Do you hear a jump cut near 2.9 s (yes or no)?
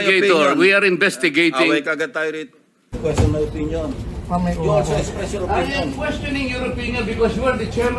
yes